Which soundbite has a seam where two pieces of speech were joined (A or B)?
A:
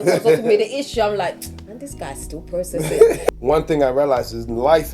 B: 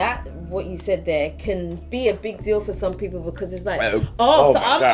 A